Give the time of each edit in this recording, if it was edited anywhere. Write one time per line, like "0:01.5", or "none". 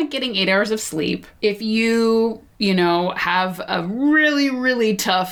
0:01.3
0:02.5